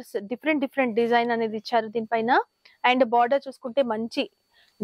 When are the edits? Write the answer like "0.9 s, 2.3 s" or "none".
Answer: none